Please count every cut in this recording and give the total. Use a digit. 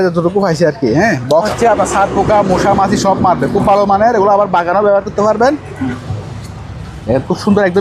2